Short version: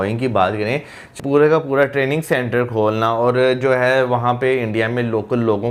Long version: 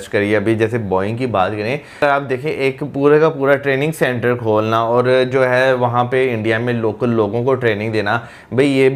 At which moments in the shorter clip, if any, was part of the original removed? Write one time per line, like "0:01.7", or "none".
0:01.0